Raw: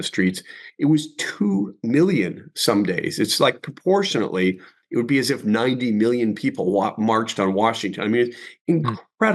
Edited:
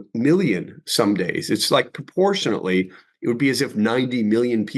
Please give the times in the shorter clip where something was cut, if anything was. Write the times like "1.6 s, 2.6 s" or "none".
none